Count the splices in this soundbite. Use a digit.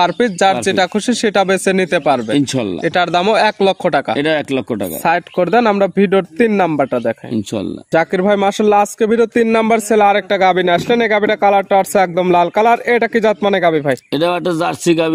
0